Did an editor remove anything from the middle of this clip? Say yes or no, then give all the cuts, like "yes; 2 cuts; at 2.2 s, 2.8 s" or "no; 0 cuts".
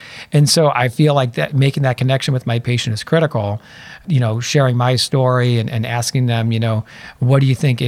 yes; 1 cut; at 4.0 s